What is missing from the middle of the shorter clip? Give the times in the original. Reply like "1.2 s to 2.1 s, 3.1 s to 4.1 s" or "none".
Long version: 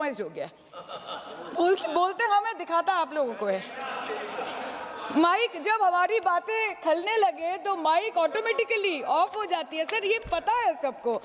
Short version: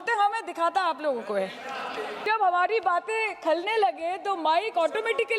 4.3 s to 5.6 s